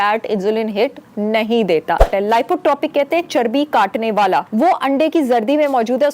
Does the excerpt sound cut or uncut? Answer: cut